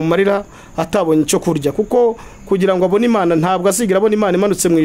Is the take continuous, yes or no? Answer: yes